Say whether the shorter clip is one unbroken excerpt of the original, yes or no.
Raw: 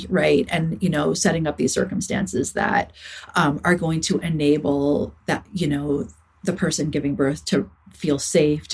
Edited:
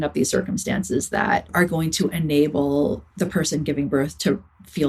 no